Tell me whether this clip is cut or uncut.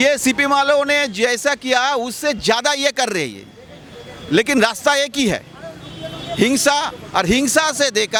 uncut